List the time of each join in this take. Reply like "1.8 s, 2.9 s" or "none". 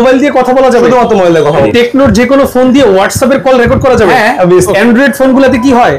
1.7 s, 4.7 s